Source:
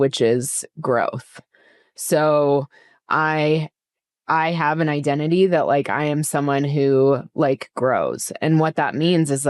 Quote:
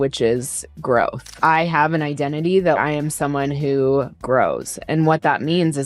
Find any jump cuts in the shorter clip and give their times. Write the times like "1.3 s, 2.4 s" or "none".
1.2 s, 2.8 s, 4.1 s